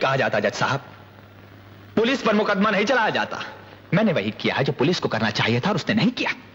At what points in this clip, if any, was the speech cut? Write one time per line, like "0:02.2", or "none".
none